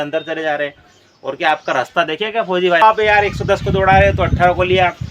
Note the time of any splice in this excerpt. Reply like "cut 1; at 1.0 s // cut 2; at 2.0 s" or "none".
cut 1; at 2.8 s